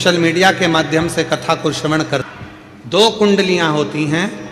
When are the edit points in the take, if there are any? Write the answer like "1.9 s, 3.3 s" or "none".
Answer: 2.2 s